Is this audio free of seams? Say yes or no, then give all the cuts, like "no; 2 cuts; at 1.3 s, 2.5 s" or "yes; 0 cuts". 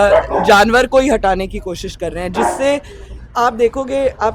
yes; 0 cuts